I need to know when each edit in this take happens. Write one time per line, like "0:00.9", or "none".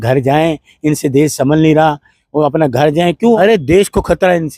0:03.4